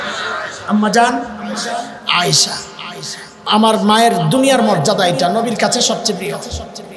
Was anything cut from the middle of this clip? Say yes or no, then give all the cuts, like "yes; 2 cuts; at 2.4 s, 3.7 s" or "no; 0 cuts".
yes; 1 cut; at 3.5 s